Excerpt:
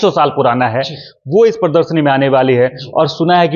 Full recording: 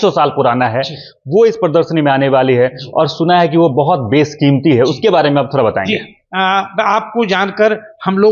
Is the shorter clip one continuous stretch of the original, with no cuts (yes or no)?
yes